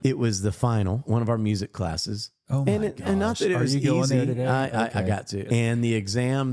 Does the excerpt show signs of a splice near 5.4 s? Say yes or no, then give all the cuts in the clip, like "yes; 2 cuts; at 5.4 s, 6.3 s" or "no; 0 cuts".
yes; 2 cuts; at 1.0 s, 5.4 s